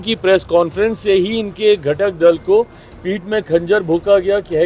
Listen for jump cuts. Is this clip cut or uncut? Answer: uncut